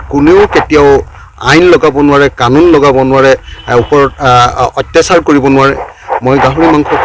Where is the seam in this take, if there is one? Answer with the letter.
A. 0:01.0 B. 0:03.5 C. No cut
C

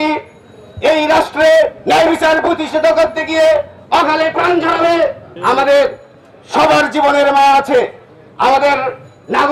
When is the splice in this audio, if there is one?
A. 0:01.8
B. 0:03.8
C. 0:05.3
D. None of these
C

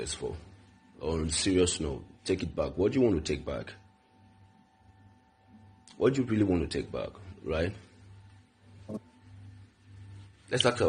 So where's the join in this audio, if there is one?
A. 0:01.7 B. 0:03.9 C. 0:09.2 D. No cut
A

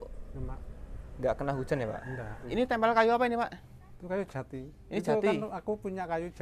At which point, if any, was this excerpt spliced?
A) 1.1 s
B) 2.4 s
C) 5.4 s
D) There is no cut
B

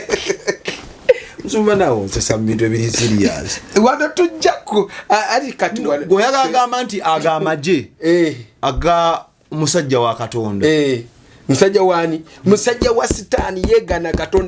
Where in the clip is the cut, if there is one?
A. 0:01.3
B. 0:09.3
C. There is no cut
C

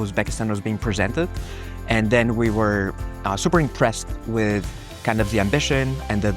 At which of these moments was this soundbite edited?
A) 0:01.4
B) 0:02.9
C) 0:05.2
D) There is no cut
D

